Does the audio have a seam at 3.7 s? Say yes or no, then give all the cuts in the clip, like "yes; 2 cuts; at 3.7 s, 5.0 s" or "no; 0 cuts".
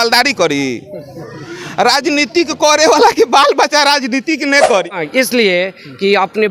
no; 1 cut; at 4.9 s